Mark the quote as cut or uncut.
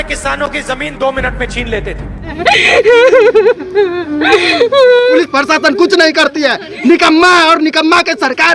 cut